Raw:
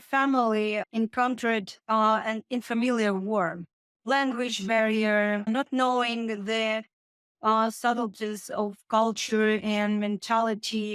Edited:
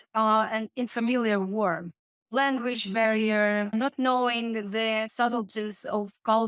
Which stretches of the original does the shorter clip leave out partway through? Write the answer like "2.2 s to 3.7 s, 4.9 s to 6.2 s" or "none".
6.8 s to 7.8 s